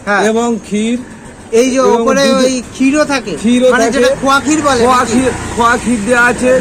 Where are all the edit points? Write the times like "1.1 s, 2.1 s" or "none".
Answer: none